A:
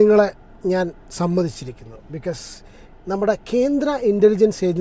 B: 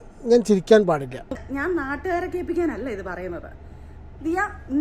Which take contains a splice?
B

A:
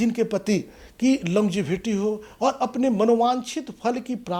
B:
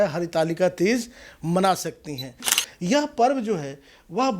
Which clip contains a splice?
B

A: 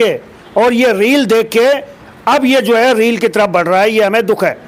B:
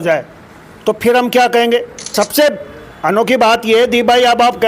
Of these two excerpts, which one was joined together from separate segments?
B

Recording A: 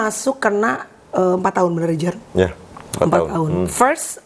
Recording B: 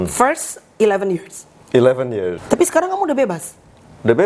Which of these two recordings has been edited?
B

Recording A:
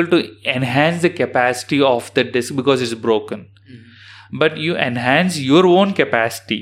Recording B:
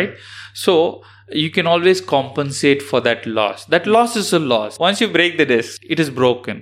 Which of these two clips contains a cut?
B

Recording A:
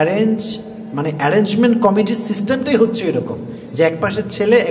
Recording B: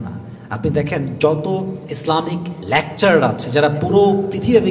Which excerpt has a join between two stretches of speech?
B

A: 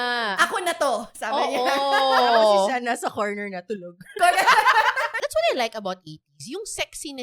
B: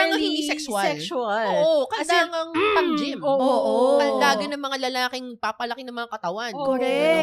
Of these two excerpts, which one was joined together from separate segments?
A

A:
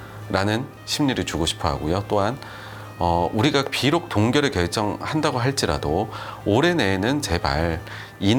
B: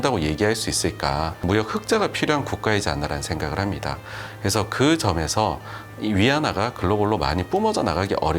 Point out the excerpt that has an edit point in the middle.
B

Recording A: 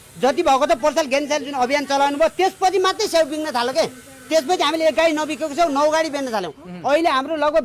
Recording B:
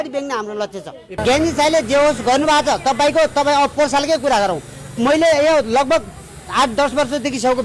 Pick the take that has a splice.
B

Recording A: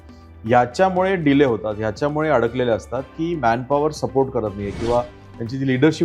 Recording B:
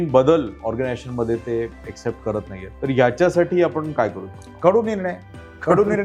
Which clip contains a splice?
B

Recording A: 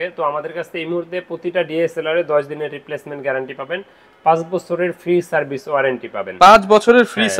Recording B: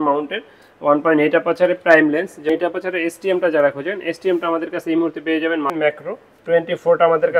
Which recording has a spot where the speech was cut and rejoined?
B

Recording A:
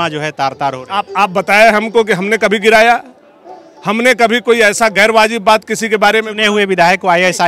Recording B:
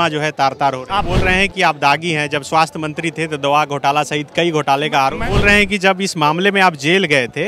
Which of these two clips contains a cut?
B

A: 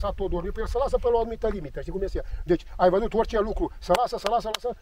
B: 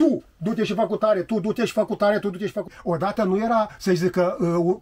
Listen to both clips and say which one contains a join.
B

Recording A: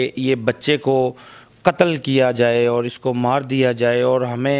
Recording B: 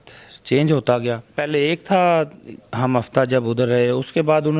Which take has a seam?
B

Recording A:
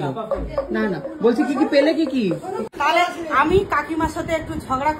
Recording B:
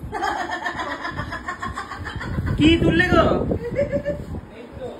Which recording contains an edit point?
A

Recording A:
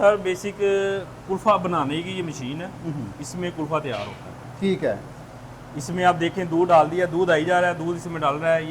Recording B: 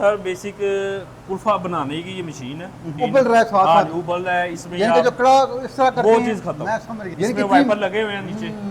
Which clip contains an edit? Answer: B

